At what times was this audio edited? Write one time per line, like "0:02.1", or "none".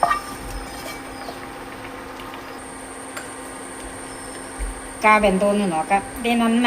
0:02.6